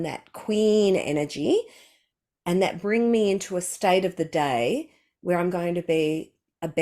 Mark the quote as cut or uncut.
uncut